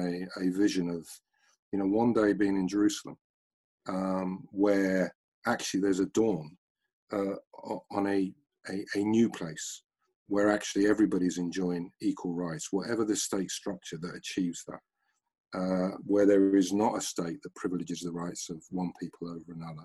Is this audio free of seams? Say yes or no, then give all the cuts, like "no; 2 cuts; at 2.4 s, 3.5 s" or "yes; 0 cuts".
yes; 0 cuts